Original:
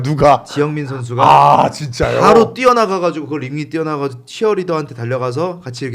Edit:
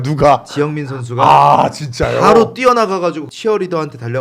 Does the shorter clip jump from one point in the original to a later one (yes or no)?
yes